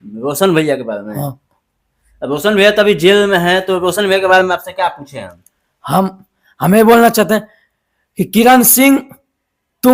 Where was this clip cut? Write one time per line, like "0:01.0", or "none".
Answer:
none